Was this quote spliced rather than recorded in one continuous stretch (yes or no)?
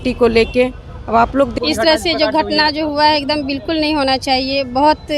yes